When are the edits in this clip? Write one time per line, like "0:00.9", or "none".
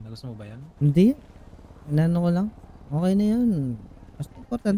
none